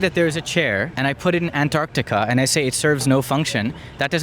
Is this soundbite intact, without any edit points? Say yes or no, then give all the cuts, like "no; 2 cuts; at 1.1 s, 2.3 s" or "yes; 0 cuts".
no; 1 cut; at 0.9 s